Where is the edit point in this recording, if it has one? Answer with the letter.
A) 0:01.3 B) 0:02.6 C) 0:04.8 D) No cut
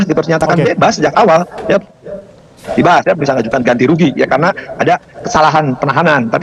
B